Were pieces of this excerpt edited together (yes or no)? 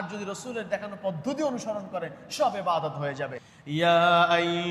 yes